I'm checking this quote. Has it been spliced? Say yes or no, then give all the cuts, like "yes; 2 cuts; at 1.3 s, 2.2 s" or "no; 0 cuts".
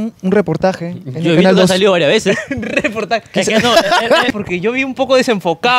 yes; 1 cut; at 4.3 s